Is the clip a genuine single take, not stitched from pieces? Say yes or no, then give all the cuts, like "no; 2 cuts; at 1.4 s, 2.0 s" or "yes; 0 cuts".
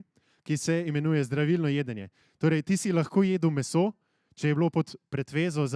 yes; 0 cuts